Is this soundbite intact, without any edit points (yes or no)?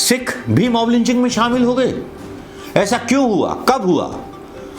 yes